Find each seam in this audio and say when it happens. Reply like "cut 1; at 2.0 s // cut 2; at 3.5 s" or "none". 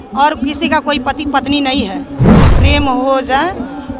cut 1; at 2.5 s